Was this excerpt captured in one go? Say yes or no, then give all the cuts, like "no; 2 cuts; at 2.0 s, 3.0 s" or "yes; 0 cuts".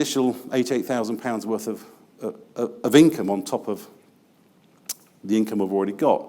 yes; 0 cuts